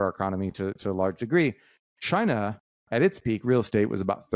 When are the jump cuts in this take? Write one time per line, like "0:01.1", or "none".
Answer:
none